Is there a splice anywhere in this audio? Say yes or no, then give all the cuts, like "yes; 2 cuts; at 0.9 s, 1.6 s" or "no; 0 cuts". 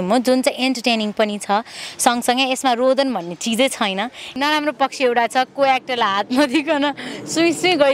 yes; 1 cut; at 4.4 s